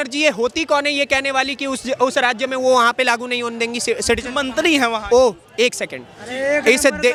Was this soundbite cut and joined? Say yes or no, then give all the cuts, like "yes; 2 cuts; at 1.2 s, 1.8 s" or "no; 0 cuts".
no; 0 cuts